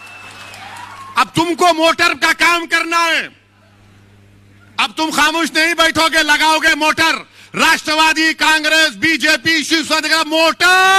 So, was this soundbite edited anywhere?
no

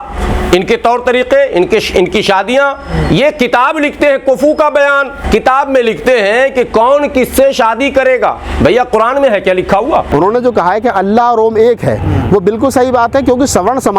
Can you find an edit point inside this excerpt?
yes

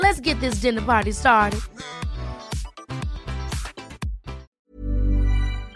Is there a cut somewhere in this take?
yes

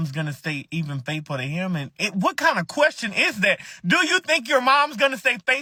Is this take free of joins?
yes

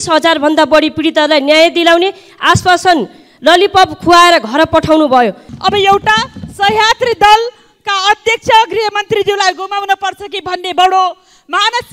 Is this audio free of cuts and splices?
no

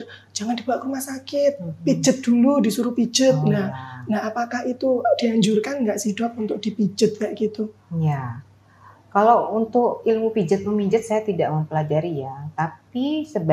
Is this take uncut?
yes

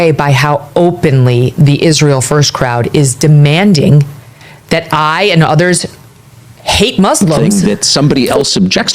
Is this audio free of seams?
no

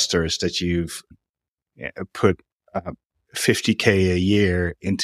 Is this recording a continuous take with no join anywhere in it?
no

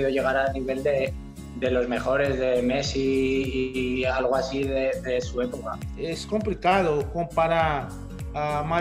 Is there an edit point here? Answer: yes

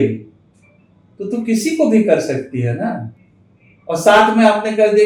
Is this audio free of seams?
yes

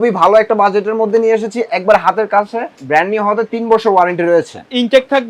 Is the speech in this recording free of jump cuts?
no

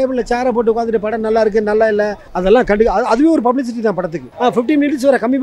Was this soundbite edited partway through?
yes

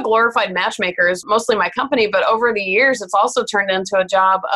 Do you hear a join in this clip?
yes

